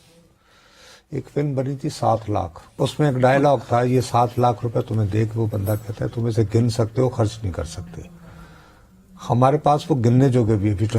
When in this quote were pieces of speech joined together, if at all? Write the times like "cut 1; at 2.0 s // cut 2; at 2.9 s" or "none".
cut 1; at 2.6 s